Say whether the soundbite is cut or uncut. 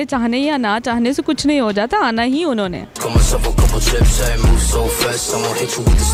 uncut